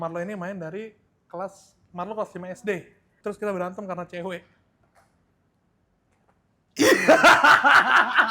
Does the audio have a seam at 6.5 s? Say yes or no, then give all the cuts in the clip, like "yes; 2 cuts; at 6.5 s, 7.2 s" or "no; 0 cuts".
no; 2 cuts; at 3.1 s, 4.8 s